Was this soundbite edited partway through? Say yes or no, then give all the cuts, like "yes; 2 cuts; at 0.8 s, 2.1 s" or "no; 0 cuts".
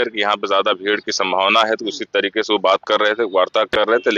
no; 0 cuts